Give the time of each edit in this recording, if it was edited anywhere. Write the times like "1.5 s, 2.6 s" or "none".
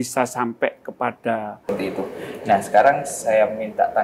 1.7 s